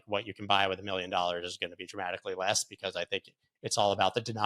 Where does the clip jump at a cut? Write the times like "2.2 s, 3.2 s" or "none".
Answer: none

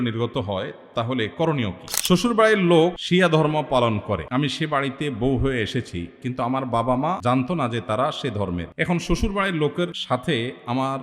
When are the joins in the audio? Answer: 1.9 s, 3.0 s, 4.2 s, 7.2 s, 8.7 s, 10.0 s

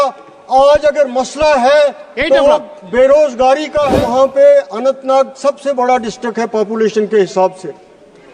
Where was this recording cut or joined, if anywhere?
3.9 s

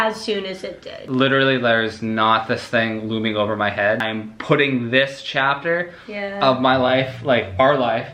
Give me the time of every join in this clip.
1.1 s, 4.0 s

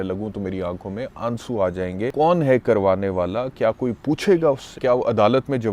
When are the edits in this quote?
2.1 s, 4.7 s

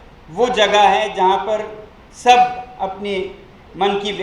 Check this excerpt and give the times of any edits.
none

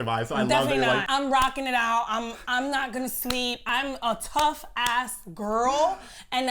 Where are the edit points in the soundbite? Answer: 1.0 s, 3.6 s

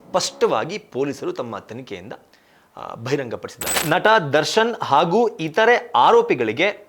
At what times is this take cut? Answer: 3.7 s

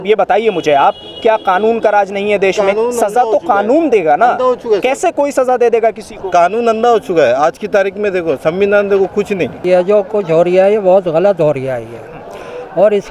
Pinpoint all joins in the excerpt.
9.6 s

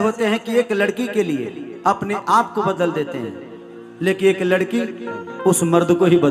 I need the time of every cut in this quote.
none

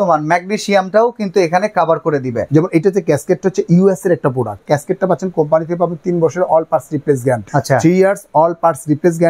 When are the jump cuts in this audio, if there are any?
2.4 s, 4.6 s, 7.4 s

